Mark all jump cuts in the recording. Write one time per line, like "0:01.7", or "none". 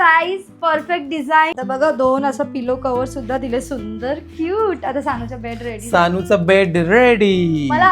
0:01.6